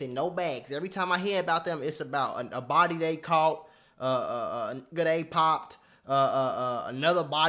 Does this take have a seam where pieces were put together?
no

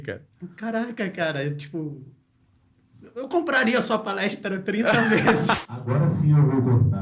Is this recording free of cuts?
no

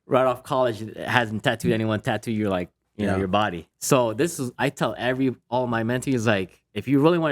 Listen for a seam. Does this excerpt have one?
yes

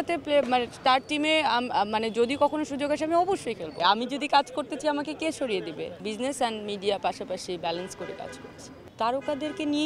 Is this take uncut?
no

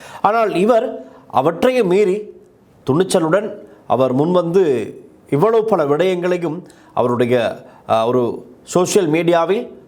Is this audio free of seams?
yes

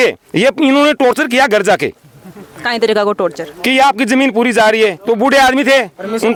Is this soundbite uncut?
yes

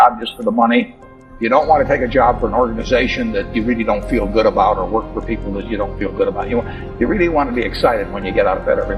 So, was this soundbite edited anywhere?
no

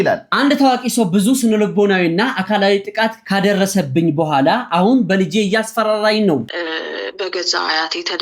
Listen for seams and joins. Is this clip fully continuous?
no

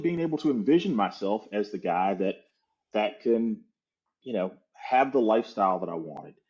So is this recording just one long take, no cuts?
yes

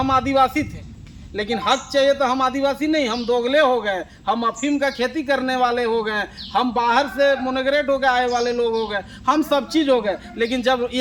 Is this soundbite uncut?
yes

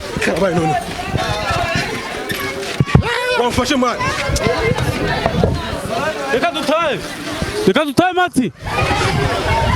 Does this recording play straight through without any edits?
yes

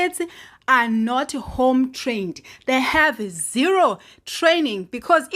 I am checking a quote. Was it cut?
no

